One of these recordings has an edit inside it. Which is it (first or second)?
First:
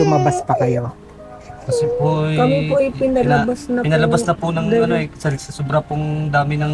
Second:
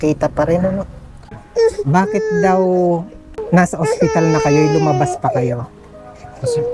second